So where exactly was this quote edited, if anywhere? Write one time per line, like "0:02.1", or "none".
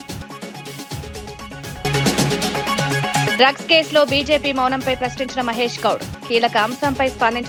none